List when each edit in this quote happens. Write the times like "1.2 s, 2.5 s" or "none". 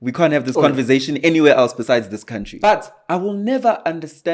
2.5 s